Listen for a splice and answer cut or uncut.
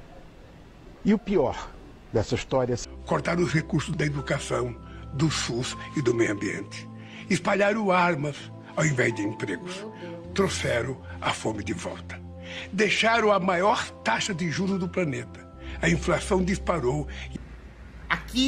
cut